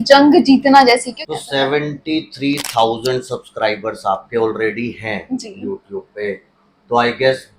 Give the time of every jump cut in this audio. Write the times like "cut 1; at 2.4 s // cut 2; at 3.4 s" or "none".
cut 1; at 1.2 s